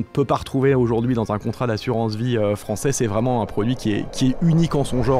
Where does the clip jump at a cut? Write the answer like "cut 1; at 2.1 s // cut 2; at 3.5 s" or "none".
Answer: none